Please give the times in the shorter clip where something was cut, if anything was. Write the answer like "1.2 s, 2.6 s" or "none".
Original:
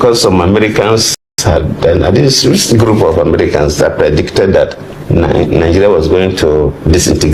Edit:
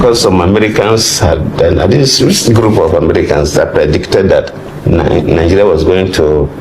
1.1 s